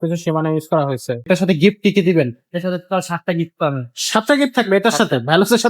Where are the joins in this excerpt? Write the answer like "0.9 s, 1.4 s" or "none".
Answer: 1.3 s